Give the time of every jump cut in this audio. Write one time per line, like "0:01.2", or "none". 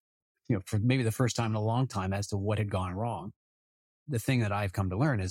0:04.0